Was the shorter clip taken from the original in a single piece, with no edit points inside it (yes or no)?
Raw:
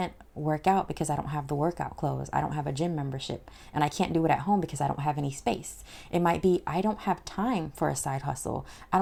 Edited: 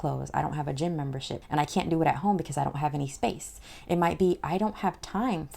no